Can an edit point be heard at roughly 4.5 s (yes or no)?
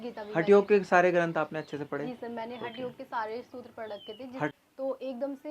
yes